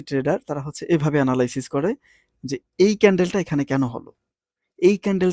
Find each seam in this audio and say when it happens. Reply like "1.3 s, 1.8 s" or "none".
none